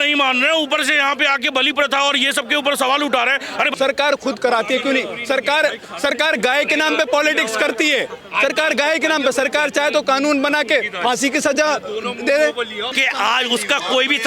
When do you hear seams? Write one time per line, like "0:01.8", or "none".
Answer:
0:03.7
0:12.9